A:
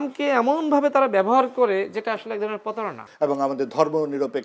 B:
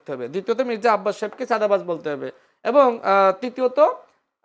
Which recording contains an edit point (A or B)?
A